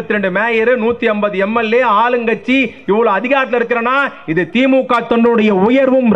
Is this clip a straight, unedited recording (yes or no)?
yes